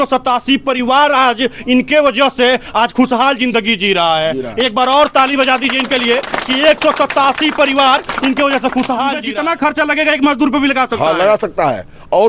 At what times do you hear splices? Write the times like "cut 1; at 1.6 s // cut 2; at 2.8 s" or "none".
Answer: cut 1; at 9.2 s